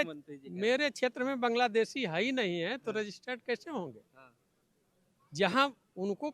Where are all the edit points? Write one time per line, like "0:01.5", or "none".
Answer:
none